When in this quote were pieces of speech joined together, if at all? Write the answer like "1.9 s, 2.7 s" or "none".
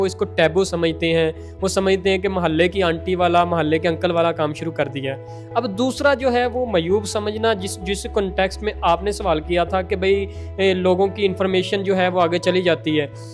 none